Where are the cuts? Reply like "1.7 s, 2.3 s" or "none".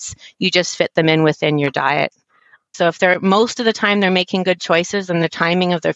2.7 s